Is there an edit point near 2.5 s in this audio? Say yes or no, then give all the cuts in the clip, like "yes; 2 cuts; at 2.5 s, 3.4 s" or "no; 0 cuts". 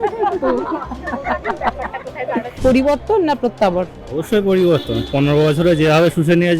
yes; 1 cut; at 2.5 s